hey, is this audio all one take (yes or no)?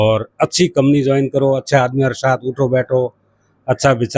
yes